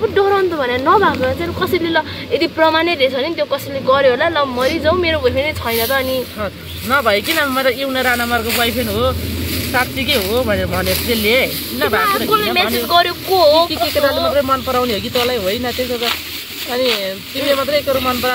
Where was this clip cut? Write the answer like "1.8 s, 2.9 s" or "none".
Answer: none